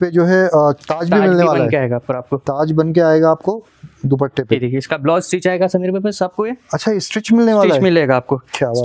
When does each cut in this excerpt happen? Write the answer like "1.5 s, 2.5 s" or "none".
4.6 s